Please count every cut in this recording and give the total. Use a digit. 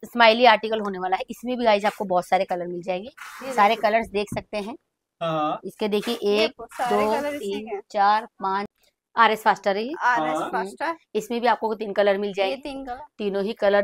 1